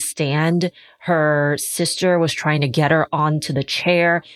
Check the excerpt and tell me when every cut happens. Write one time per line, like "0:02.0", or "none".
none